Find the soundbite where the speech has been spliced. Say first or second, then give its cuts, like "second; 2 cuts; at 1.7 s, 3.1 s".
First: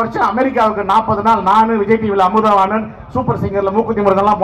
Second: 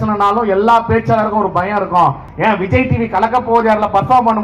second; 1 cut; at 2.3 s